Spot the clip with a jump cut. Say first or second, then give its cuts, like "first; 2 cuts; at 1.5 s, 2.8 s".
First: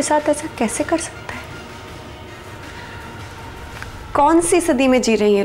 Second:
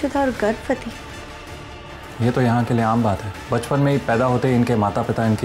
second; 1 cut; at 3.3 s